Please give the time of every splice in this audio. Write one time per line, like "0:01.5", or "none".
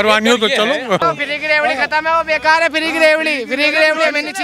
0:01.0